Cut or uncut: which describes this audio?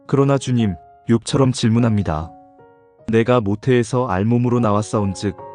cut